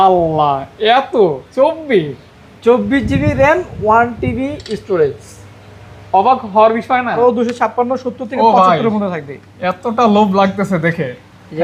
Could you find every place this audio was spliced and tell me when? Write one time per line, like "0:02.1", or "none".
0:07.2